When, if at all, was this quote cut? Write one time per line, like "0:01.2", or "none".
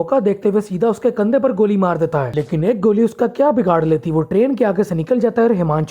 none